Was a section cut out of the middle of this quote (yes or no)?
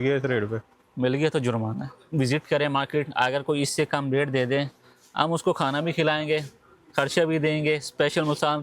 yes